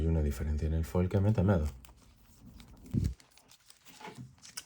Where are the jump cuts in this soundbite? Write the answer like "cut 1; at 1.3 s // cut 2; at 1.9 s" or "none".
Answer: cut 1; at 2.9 s

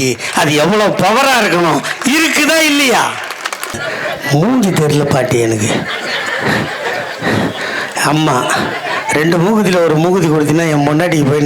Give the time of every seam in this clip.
cut 1; at 3.8 s

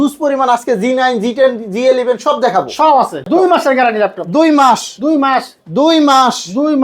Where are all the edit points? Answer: cut 1; at 3.3 s

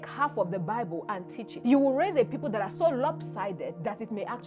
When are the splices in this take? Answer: cut 1; at 1.4 s

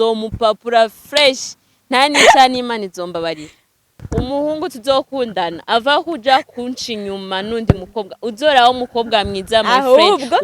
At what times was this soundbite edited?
cut 1; at 4.0 s

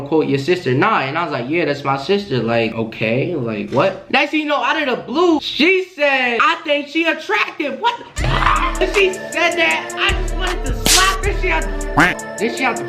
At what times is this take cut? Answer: cut 1; at 4.1 s // cut 2; at 5.4 s

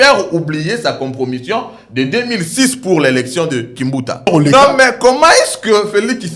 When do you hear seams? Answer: cut 1; at 4.3 s

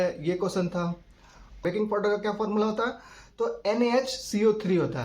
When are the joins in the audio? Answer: cut 1; at 1.6 s

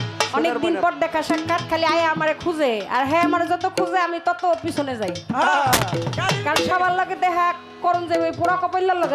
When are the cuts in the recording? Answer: none

